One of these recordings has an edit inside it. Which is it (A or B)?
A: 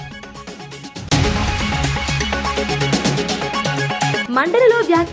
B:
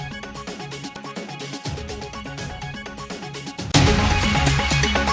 A